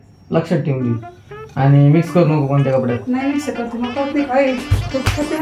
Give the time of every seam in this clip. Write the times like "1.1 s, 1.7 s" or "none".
none